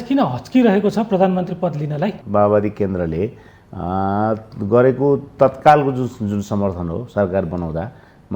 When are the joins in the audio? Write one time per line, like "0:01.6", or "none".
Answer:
0:02.2